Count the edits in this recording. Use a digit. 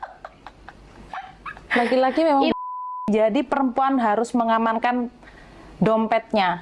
1